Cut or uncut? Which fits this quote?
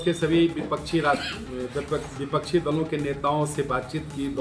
uncut